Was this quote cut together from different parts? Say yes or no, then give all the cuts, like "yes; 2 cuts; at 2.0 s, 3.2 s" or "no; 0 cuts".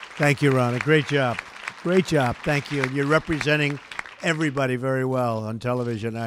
no; 0 cuts